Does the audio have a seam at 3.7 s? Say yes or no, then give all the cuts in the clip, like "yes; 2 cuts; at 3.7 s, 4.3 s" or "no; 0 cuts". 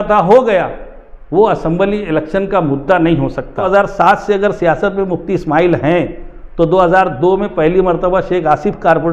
yes; 1 cut; at 3.7 s